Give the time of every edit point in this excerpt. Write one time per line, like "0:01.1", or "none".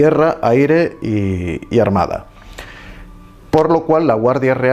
0:02.0